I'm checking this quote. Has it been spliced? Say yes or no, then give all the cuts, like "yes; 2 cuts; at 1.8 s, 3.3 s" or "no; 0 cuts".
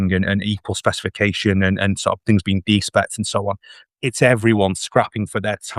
no; 0 cuts